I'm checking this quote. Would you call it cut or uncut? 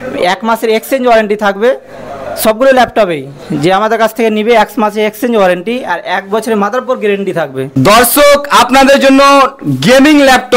cut